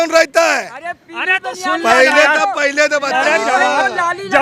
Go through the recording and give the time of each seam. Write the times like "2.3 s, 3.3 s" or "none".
none